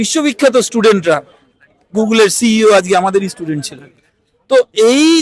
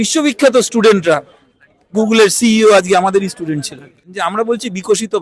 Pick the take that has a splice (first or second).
second